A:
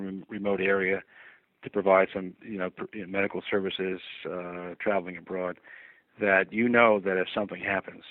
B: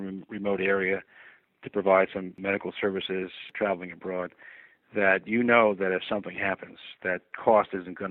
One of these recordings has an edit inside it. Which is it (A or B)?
B